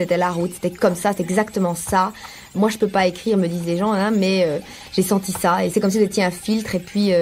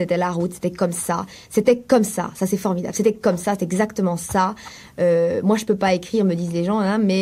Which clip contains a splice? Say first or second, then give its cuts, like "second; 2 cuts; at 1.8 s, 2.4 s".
first; 3 cuts; at 0.8 s, 2.5 s, 5.7 s